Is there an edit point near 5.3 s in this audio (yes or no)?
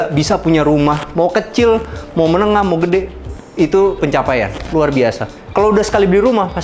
no